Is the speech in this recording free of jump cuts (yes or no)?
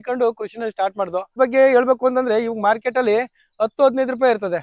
no